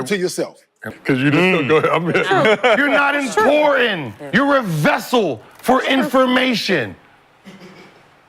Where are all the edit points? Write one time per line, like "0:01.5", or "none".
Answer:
0:00.9